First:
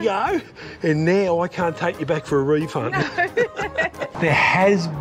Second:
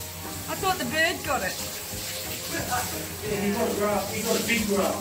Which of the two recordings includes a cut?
first; 1 cut; at 4.0 s

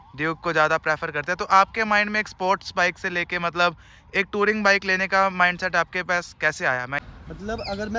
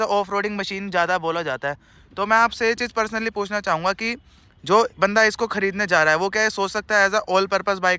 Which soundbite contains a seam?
first; 1 cut; at 7.0 s

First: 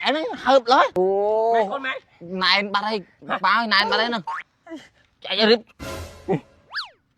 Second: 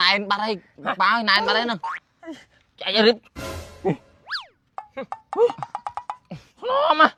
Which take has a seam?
first; 1 cut; at 0.9 s

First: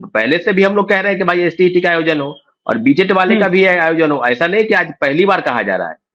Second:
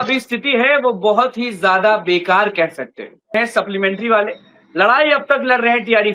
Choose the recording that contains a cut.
second; 1 cut; at 3.3 s

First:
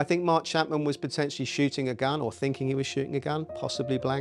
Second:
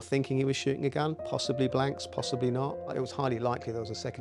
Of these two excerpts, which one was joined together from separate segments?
second; 1 cut; at 2.9 s

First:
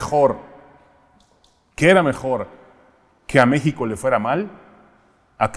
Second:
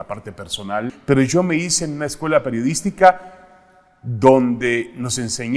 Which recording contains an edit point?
second; 1 cut; at 1.0 s

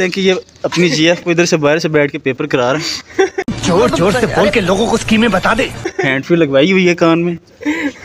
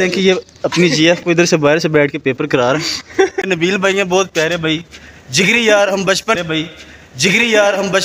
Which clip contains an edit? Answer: second; 2 cuts; at 3.4 s, 6.4 s

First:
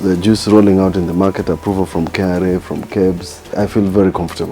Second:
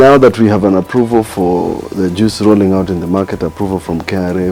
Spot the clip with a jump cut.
first; 1 cut; at 3.5 s

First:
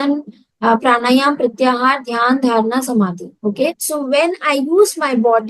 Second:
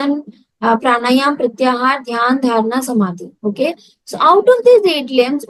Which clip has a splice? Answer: first; 1 cut; at 3.8 s

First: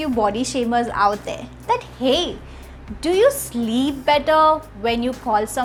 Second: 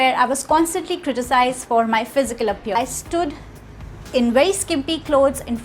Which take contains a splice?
second; 1 cut; at 2.7 s

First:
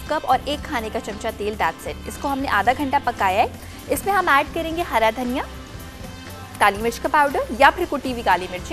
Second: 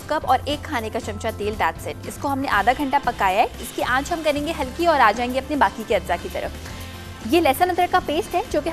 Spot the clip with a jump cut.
first; 1 cut; at 3.6 s

